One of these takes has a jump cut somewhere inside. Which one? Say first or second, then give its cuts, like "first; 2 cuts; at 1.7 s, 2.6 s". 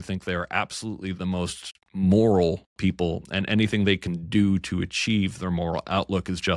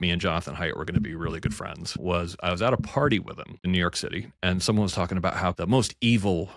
second; 3 cuts; at 2.0 s, 3.7 s, 5.6 s